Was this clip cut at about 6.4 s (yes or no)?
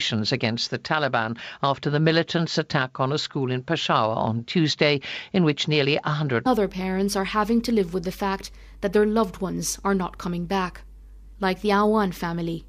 no